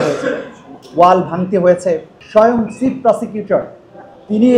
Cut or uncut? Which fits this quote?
cut